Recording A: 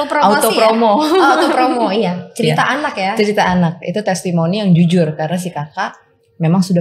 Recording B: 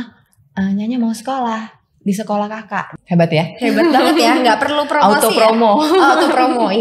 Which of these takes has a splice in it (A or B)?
B